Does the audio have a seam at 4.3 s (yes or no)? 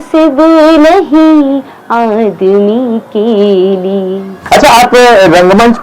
yes